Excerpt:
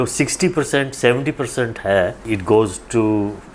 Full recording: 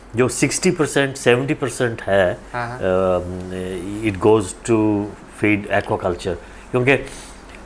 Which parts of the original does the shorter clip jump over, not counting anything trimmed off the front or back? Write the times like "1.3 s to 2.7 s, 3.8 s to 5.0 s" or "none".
2.4 s to 3.9 s